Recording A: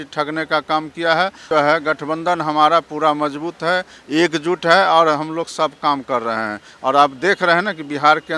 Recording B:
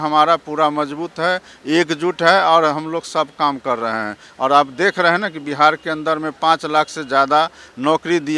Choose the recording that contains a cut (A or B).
A